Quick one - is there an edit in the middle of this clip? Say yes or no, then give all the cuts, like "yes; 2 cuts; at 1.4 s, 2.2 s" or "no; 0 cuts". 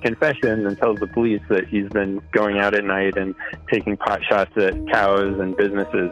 no; 0 cuts